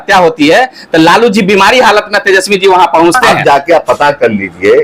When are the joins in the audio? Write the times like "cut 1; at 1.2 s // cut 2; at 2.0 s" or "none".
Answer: cut 1; at 3.3 s